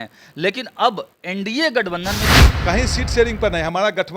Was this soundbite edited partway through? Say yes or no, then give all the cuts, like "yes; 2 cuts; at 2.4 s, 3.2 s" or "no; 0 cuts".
yes; 1 cut; at 2.5 s